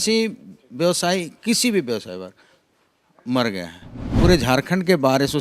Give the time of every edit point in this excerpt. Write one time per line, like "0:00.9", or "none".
0:04.0